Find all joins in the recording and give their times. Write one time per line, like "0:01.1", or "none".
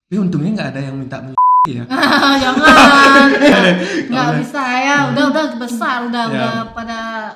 0:03.5